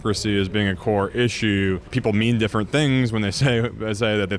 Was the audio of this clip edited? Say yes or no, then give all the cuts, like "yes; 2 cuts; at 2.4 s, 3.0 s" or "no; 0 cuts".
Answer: no; 0 cuts